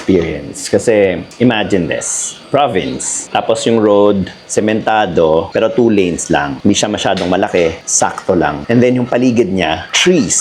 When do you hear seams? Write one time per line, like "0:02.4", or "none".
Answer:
0:01.3